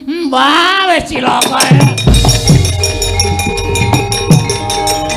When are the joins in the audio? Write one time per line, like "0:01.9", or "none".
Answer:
none